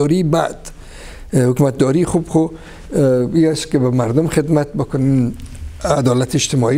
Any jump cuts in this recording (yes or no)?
no